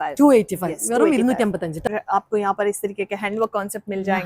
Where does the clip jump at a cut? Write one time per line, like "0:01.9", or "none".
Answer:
0:01.9